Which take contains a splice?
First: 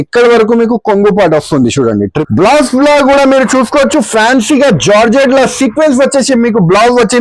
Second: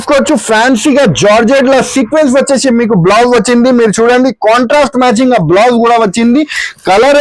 first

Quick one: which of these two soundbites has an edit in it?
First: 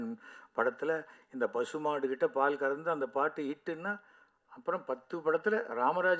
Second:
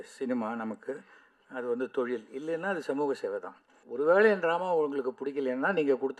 second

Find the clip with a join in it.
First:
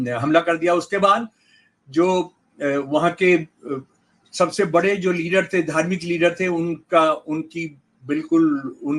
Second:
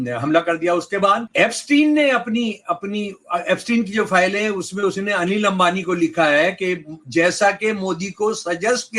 second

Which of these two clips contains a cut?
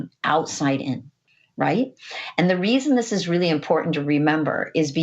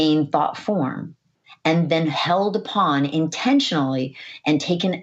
first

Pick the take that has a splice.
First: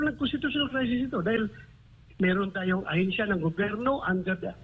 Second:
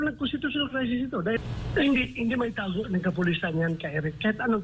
second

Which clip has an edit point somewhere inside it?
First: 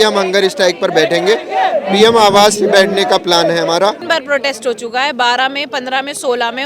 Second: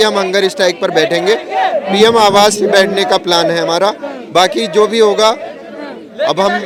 first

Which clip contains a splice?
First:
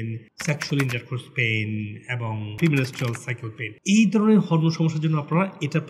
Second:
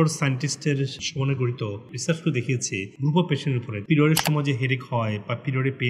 second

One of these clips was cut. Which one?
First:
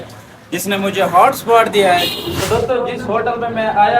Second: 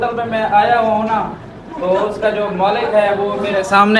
first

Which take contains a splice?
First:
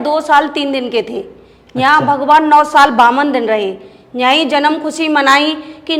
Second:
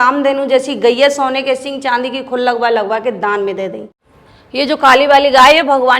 second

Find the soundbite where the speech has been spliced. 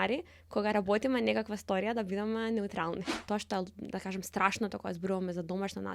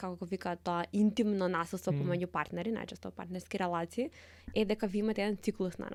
first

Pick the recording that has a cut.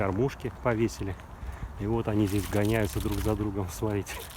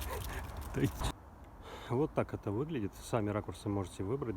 second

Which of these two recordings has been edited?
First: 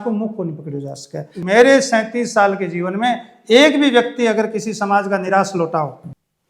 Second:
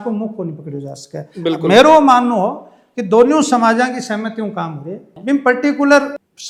first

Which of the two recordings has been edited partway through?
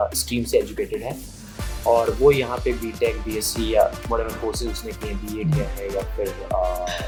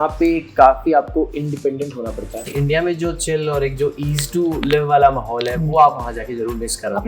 second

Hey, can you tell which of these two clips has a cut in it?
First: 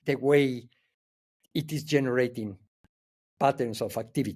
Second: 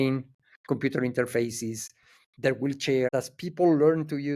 second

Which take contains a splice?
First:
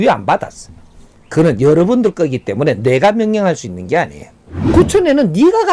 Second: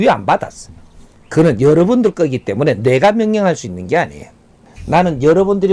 first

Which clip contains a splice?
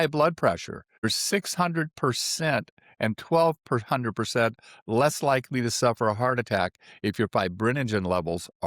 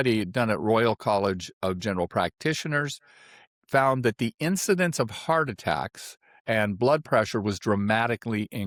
first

